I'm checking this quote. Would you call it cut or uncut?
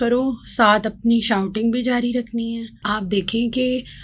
cut